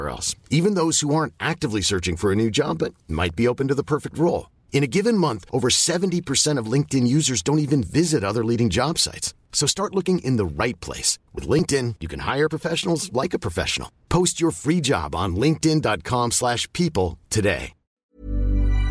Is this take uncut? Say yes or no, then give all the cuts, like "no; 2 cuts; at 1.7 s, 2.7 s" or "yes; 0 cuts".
no; 1 cut; at 18.0 s